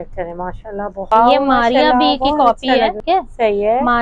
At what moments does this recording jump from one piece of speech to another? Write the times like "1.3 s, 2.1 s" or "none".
1.1 s, 3.0 s